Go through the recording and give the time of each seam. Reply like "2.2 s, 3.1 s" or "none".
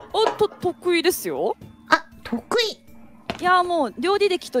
none